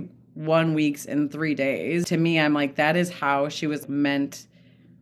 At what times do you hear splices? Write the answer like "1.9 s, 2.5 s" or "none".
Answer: 2.1 s, 3.8 s